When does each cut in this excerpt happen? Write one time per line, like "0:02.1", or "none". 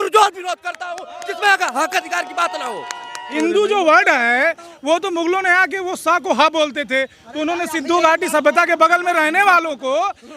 0:03.3